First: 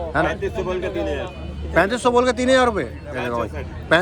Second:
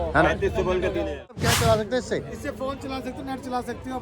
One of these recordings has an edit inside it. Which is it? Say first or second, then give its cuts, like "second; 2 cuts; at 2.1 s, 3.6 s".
second; 1 cut; at 1.5 s